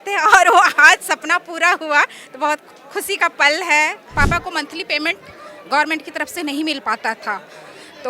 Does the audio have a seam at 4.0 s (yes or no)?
yes